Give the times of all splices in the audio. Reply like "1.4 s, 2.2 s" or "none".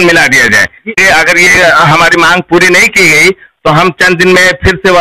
1.0 s